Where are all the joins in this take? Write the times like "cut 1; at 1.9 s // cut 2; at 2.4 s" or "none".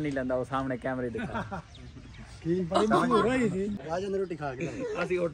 cut 1; at 3.7 s